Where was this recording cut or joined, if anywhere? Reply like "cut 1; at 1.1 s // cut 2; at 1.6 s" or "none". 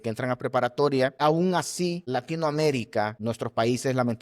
cut 1; at 1.2 s // cut 2; at 2.0 s // cut 3; at 3.2 s

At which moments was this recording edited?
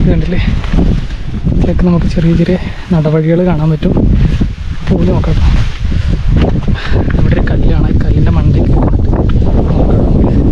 none

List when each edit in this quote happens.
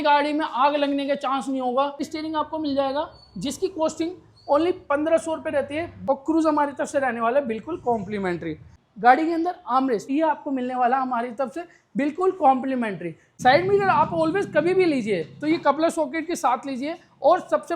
cut 1; at 2.1 s // cut 2; at 6.0 s // cut 3; at 8.7 s // cut 4; at 10.0 s // cut 5; at 13.3 s

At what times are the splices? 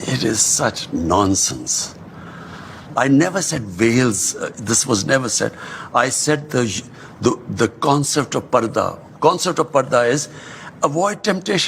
none

